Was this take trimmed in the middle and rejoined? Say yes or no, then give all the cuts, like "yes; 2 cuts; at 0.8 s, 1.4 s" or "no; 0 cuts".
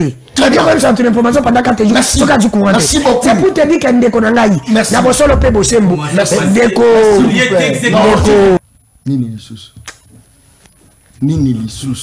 yes; 1 cut; at 8.6 s